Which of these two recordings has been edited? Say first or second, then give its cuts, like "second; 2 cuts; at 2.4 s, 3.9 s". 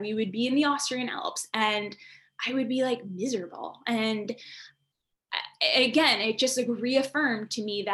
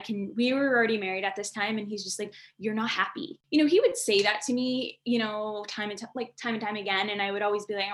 second; 1 cut; at 3.3 s